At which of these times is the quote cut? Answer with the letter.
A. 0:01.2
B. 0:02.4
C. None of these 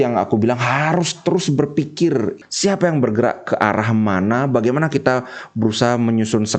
B